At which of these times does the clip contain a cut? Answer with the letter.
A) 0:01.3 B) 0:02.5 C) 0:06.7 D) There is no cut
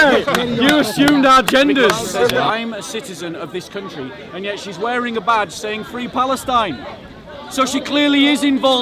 B